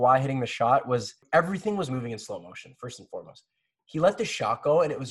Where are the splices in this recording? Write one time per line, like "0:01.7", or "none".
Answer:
0:01.2